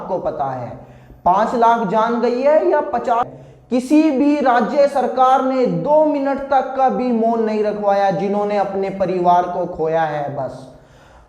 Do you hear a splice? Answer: yes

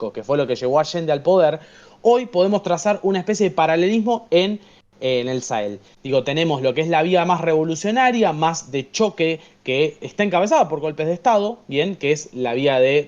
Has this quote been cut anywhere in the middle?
no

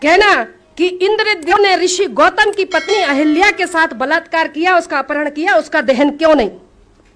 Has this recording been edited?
yes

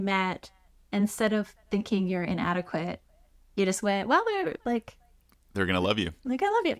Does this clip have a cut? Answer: no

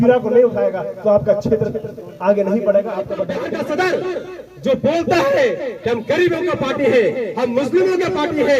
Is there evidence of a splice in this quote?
yes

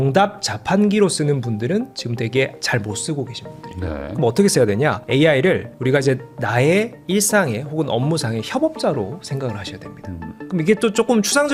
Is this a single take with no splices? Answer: yes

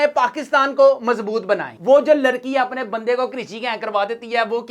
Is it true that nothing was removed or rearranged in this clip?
no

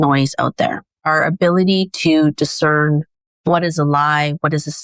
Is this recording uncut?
no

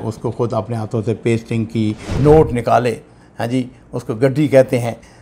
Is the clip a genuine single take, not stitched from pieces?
no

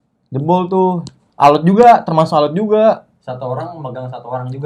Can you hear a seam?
no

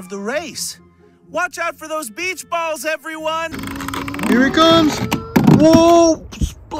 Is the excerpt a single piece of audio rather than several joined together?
no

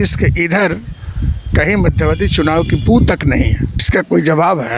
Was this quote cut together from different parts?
yes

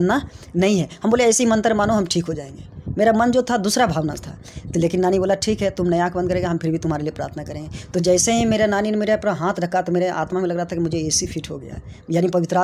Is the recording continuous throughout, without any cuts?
yes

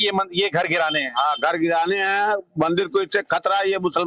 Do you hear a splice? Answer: no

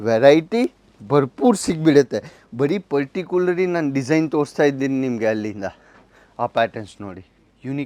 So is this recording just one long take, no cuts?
yes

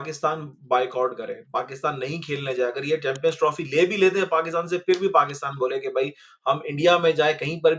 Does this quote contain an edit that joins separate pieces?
no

